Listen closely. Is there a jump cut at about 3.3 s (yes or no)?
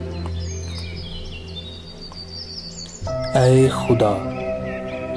yes